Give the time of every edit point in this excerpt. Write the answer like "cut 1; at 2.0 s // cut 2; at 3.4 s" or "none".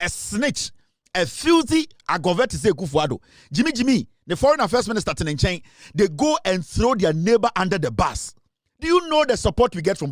none